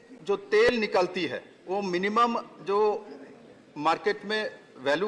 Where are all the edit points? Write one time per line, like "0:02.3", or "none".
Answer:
0:01.5